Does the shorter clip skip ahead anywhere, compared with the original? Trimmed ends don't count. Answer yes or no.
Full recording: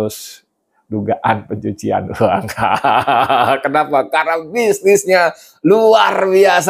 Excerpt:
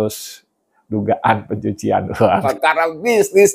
yes